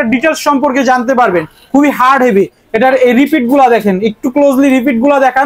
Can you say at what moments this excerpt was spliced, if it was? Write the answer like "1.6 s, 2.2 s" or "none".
none